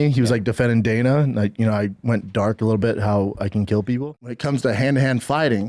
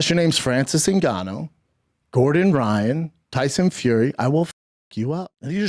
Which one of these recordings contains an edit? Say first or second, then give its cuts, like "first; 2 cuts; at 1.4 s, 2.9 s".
first; 1 cut; at 4.0 s